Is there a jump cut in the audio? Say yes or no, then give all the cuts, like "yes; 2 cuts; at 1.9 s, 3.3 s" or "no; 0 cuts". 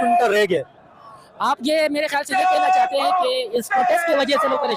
no; 0 cuts